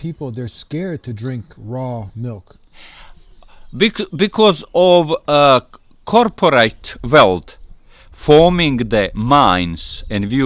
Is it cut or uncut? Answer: uncut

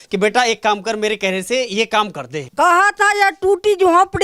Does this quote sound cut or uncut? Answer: cut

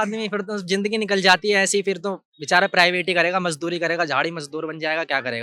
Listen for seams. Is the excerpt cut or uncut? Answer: uncut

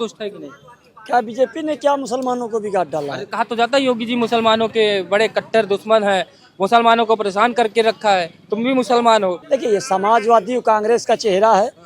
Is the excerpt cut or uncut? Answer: cut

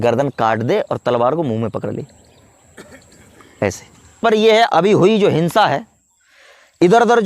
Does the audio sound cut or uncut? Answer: cut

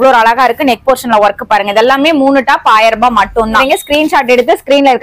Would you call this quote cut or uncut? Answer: cut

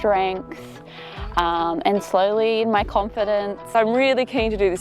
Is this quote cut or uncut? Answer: cut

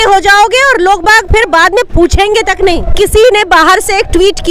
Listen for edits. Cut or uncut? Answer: cut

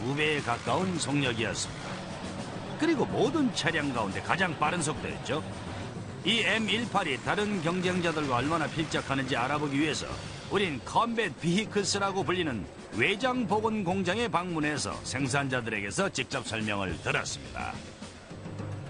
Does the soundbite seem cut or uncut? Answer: cut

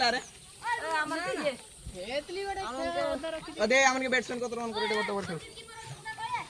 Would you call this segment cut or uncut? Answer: uncut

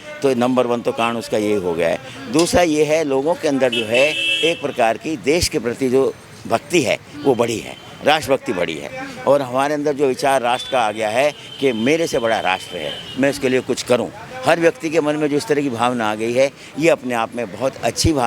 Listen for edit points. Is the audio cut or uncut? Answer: uncut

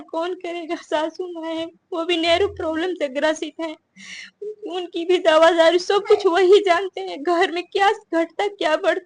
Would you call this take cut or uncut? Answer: uncut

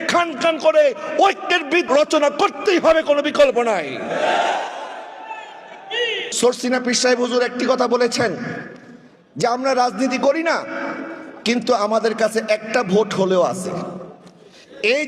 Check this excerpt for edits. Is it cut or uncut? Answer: cut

